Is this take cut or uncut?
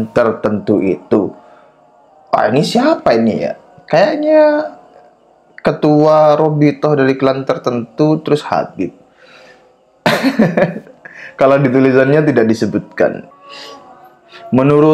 cut